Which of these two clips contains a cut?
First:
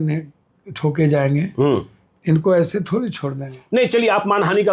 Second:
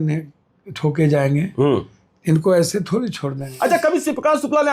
second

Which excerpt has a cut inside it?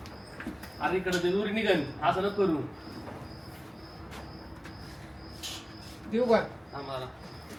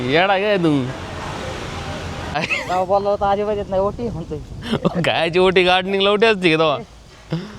second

